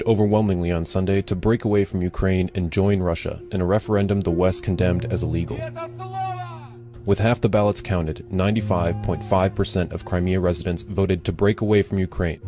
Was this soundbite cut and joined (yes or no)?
yes